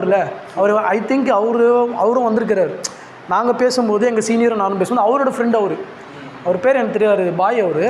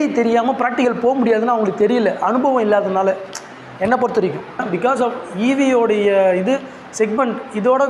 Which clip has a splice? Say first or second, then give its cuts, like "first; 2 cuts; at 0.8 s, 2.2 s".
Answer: second; 1 cut; at 4.6 s